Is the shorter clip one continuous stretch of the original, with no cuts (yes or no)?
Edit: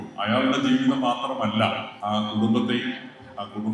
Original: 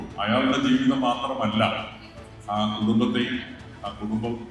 no